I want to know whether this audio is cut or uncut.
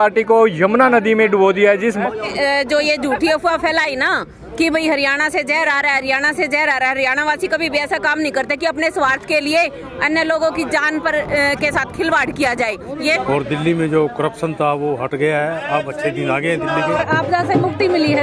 cut